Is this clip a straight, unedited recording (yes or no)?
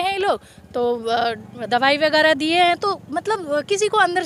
yes